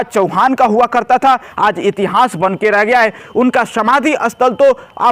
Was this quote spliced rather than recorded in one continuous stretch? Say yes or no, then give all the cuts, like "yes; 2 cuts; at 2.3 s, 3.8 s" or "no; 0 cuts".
no; 0 cuts